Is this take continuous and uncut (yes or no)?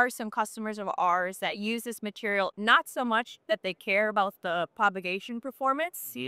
yes